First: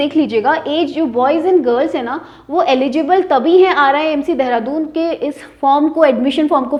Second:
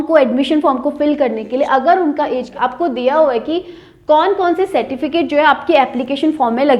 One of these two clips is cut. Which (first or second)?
second